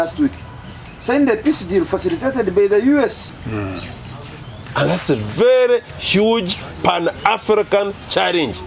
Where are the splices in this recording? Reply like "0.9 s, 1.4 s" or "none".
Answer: 3.3 s